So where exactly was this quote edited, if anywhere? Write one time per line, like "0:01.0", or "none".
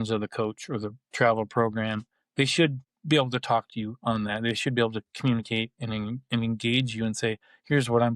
0:02.9